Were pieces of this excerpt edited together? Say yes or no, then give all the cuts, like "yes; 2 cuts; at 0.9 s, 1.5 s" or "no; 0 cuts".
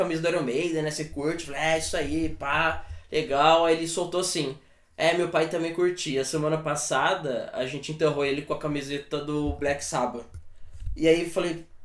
no; 0 cuts